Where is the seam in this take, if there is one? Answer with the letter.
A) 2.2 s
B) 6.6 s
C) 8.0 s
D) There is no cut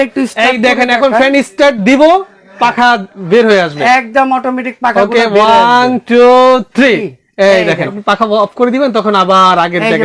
C